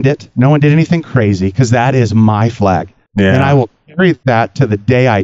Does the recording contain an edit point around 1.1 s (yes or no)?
no